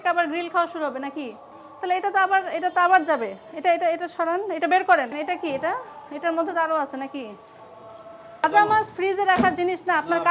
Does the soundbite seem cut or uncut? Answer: uncut